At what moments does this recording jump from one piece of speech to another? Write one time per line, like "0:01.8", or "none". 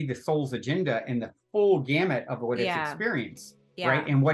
none